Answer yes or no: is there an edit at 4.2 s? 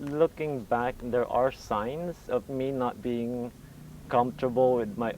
no